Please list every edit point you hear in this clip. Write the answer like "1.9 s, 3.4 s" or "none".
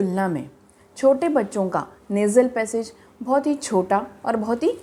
none